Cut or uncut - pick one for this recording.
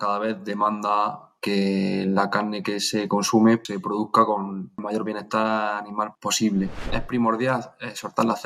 cut